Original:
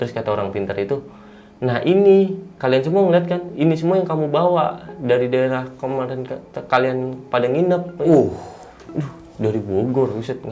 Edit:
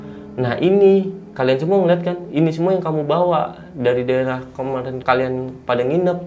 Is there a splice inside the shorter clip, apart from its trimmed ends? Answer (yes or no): yes